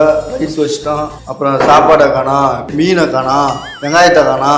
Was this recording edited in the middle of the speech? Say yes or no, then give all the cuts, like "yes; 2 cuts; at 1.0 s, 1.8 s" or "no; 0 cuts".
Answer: yes; 2 cuts; at 1.2 s, 2.7 s